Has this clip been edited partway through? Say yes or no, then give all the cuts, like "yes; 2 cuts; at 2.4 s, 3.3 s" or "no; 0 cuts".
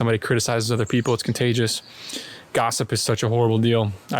no; 0 cuts